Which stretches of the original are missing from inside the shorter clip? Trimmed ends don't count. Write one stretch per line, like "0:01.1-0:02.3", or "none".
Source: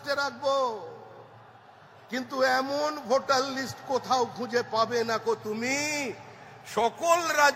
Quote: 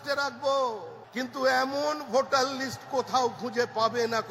0:01.0-0:01.9